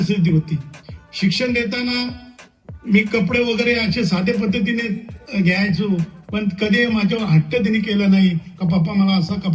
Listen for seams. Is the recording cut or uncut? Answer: uncut